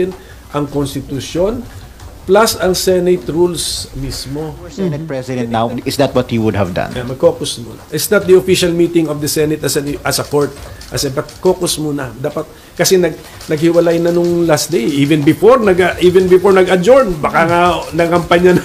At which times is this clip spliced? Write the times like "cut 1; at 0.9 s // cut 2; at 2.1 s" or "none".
cut 1; at 5.2 s